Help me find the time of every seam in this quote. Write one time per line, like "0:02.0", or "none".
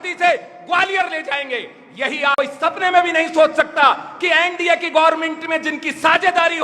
0:02.3